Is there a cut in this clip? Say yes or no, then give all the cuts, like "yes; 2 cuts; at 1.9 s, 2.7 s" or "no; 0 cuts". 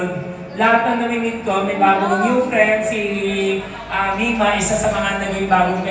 no; 0 cuts